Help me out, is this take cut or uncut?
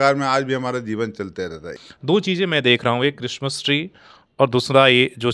cut